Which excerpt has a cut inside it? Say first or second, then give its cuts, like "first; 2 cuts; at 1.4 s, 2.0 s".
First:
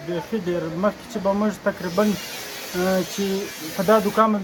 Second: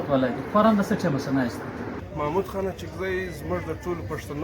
second; 1 cut; at 2.0 s